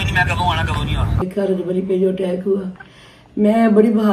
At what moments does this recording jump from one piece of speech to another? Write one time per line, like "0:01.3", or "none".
0:01.2